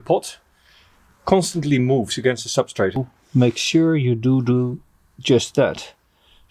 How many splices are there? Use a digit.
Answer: 1